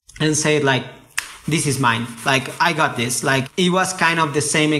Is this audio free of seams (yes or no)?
no